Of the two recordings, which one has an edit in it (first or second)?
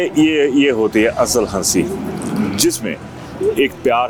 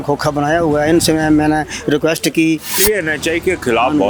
second